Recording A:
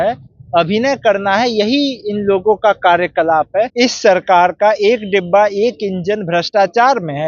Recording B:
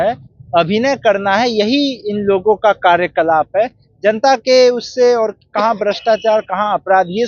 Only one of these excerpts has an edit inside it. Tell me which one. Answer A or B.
A